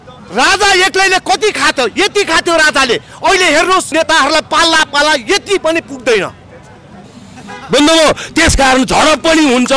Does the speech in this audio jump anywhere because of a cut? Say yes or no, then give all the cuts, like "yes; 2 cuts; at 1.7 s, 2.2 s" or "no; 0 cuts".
yes; 2 cuts; at 3.9 s, 7.1 s